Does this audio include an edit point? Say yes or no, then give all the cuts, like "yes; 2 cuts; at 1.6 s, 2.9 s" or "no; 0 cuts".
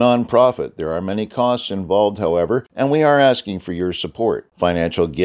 yes; 1 cut; at 2.7 s